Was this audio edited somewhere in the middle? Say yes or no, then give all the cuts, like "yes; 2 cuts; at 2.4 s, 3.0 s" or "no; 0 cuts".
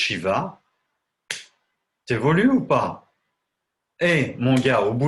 no; 0 cuts